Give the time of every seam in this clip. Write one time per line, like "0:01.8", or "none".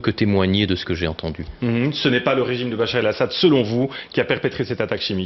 0:02.2